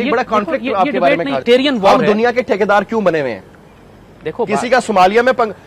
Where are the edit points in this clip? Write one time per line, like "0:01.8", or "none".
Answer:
0:01.4

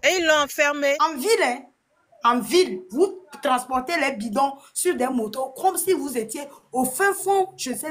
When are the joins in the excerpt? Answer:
0:01.0

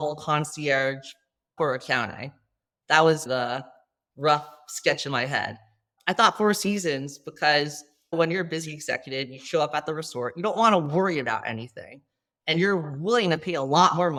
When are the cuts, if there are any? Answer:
none

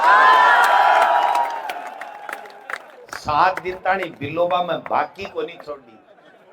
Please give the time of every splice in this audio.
none

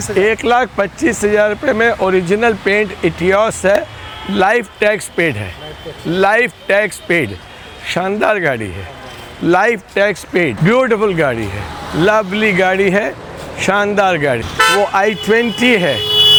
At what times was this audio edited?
none

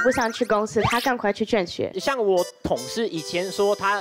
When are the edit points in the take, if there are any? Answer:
0:02.0

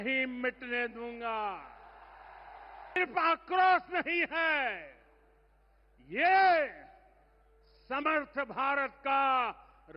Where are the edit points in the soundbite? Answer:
0:03.0

